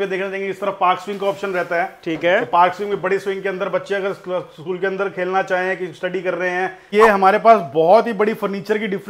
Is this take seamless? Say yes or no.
no